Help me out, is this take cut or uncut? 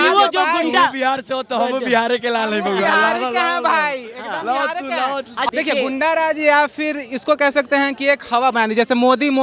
cut